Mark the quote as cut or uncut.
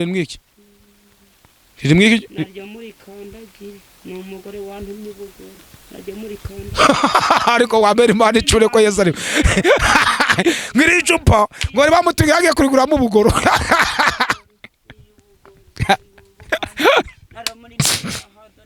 uncut